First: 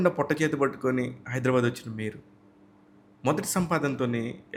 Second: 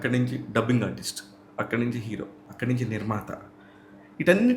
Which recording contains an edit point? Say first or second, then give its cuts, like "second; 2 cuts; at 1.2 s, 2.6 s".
second; 1 cut; at 2.4 s